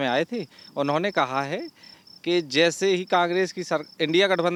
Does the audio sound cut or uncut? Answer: uncut